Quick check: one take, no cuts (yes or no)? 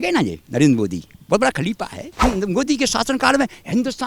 no